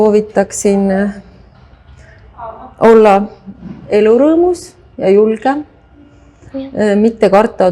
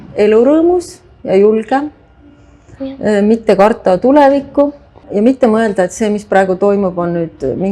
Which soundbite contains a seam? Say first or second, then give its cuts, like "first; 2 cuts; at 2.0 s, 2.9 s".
second; 1 cut; at 5.0 s